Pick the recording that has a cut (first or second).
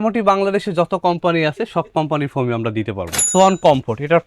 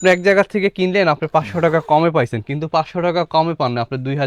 first